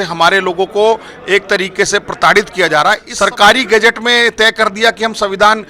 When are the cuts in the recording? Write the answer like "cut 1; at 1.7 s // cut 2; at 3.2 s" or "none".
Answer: cut 1; at 3.1 s